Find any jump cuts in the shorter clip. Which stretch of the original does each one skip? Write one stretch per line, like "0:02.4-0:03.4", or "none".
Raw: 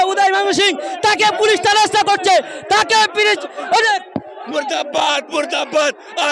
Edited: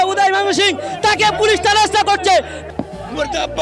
0:02.6-0:04.0